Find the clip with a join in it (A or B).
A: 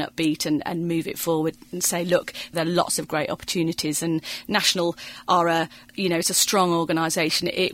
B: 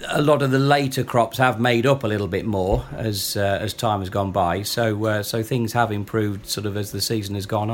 A